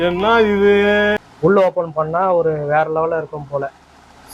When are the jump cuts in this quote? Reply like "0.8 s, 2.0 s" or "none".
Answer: 1.1 s

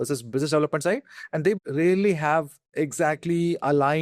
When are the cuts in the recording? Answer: 1.6 s, 2.6 s

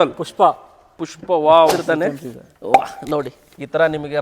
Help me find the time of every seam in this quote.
1.7 s

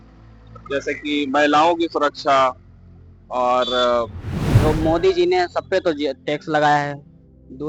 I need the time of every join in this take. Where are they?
4.6 s

